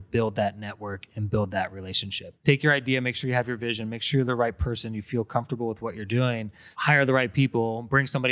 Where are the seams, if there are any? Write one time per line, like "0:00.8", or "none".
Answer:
0:02.2
0:06.6